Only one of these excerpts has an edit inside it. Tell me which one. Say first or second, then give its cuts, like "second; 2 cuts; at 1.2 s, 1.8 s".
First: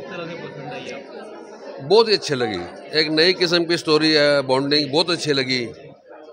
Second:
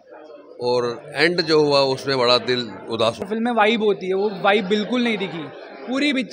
second; 1 cut; at 3.2 s